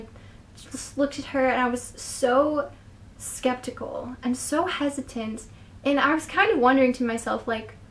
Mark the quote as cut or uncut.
uncut